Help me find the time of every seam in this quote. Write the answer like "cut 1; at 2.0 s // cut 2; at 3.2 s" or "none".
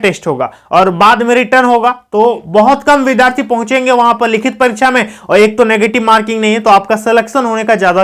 none